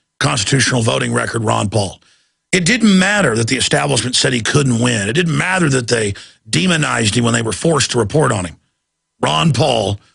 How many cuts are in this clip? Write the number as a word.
one